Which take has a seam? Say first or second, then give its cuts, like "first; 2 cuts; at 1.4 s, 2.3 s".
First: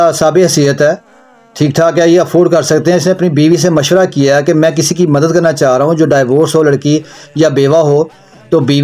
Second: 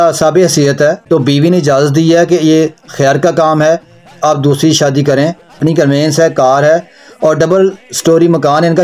second; 2 cuts; at 1.0 s, 5.5 s